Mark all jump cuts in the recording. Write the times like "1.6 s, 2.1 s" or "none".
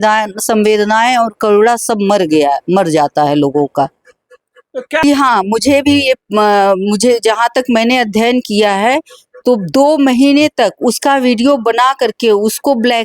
5.0 s